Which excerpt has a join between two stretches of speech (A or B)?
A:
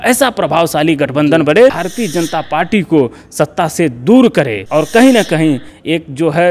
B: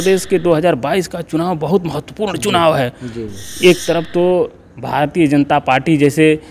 A